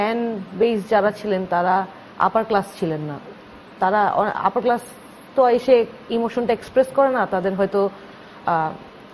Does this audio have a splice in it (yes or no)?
no